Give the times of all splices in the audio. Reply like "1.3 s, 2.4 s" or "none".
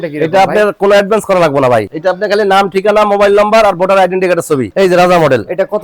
1.9 s, 4.7 s

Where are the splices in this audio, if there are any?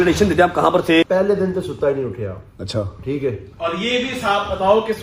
1.1 s

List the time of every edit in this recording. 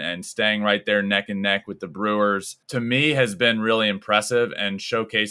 2.6 s

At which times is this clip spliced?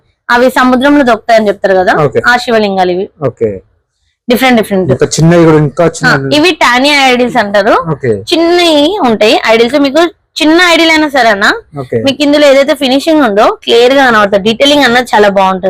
none

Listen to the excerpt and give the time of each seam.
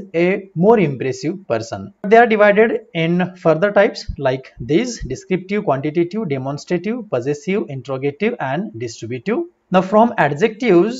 2.1 s, 9.6 s

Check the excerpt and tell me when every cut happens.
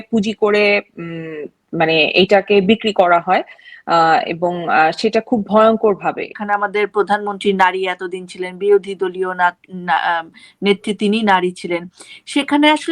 6.4 s

